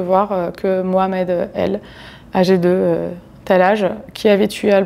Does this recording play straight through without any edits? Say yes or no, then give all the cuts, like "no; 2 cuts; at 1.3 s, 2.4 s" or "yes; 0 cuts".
yes; 0 cuts